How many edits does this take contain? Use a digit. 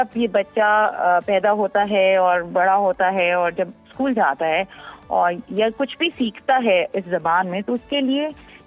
0